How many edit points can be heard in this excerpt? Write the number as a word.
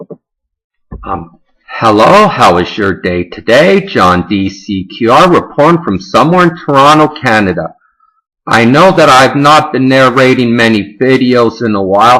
zero